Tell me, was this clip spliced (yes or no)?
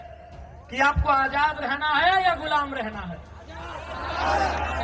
no